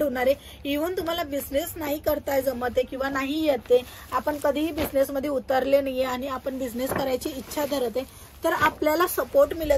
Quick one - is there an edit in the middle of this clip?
no; 0 cuts

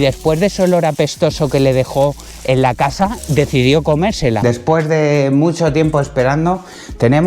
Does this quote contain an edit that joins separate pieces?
yes; 1 cut; at 4.4 s

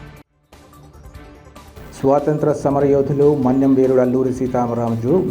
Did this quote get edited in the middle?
yes; 1 cut; at 1.7 s

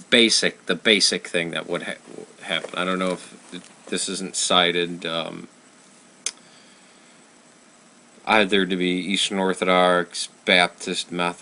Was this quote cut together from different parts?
no; 0 cuts

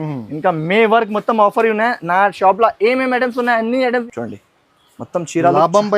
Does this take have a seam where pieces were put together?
yes; 1 cut; at 4.1 s

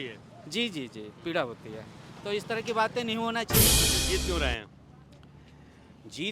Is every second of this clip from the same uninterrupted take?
no; 1 cut; at 3.9 s

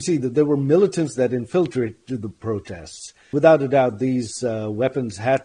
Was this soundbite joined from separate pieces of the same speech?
yes; 1 cut; at 3.3 s

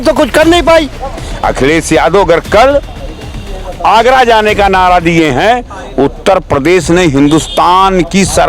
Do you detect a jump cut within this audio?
yes; 1 cut; at 0.9 s

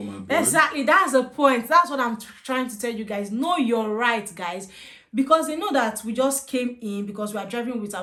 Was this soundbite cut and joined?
no; 0 cuts

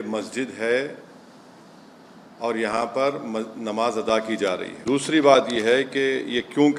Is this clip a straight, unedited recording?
yes; 0 cuts

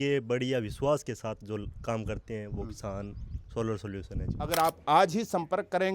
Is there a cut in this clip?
yes; 1 cut; at 4.4 s

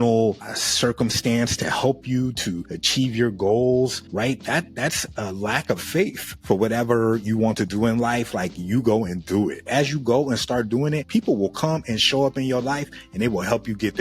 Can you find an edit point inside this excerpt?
yes; 1 cut; at 6.3 s

